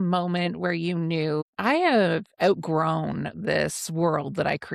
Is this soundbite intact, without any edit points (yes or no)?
yes